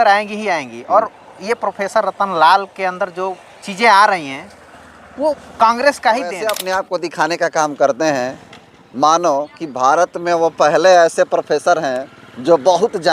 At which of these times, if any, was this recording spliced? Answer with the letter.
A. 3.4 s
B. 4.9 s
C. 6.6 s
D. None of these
C